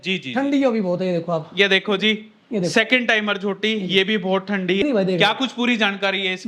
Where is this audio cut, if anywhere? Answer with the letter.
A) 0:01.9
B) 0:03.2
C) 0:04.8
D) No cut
C